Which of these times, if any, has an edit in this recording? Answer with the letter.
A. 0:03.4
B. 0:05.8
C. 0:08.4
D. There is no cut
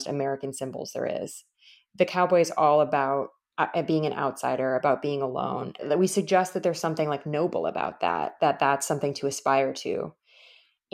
B